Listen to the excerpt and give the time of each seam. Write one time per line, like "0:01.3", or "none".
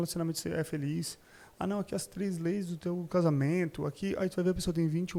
none